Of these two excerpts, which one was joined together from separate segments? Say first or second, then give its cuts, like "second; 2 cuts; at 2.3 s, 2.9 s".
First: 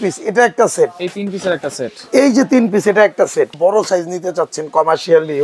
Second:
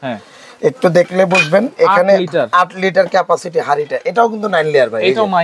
first; 1 cut; at 3.5 s